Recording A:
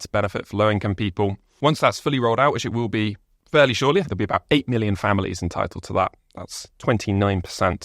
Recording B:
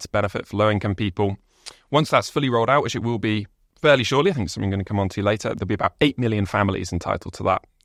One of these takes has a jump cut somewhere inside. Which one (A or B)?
A